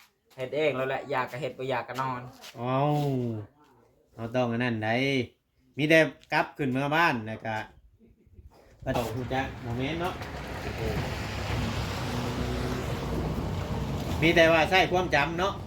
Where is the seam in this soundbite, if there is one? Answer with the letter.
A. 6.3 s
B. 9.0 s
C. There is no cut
B